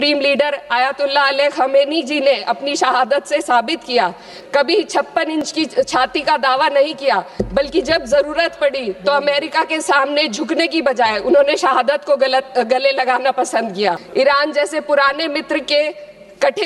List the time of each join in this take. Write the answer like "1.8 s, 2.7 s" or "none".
4.3 s, 14.0 s